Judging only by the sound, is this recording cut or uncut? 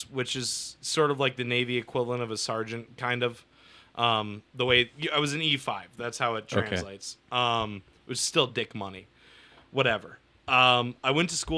uncut